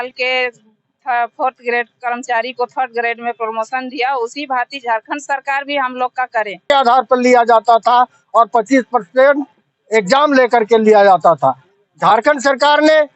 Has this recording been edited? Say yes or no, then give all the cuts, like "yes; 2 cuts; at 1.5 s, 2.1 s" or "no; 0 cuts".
yes; 1 cut; at 6.6 s